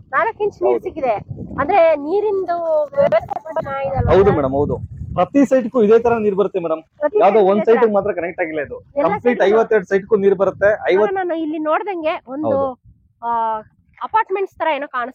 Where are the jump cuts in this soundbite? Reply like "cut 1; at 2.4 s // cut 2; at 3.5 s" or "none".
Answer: cut 1; at 11.1 s